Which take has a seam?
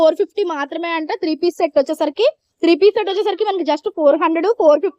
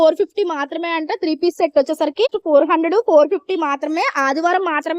second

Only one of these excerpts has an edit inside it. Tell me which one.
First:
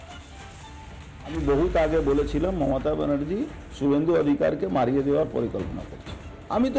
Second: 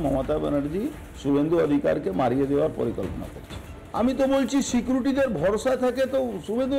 first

